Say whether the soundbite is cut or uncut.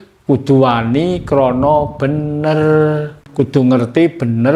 cut